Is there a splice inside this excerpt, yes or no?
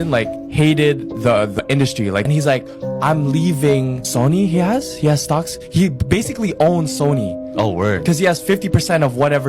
no